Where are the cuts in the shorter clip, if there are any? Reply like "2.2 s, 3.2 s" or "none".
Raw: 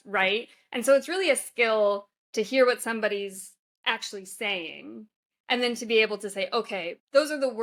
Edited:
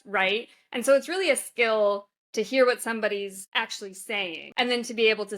3.4 s, 4.4 s

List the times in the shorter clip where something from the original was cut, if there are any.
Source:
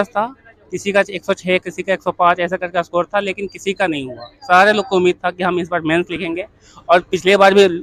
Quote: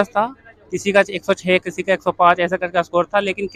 none

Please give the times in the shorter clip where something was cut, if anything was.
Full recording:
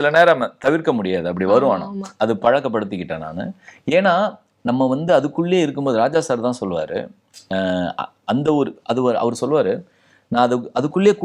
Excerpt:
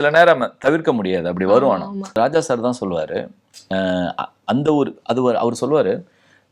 2.1 s

